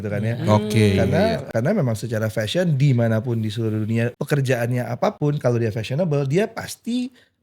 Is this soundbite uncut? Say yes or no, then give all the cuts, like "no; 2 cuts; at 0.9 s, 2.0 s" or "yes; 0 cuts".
no; 2 cuts; at 1.5 s, 4.2 s